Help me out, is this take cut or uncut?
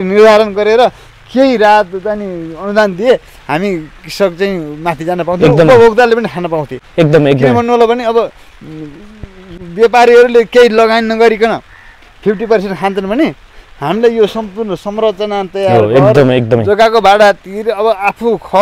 uncut